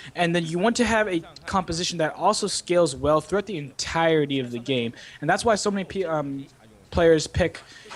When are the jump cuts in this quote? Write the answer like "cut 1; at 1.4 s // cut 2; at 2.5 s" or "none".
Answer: none